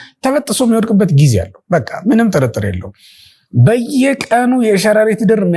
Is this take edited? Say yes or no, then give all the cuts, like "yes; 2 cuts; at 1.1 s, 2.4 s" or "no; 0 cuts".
no; 0 cuts